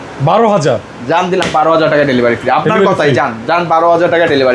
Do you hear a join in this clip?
no; 0 cuts

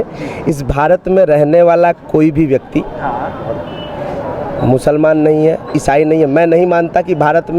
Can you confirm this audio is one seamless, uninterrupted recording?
yes; 0 cuts

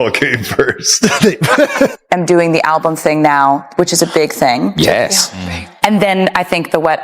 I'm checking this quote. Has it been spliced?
yes; 1 cut; at 1.7 s

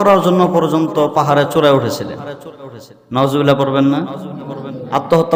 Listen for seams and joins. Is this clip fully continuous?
yes; 0 cuts

